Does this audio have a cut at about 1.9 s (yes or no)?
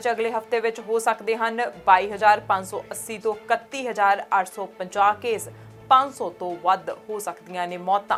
no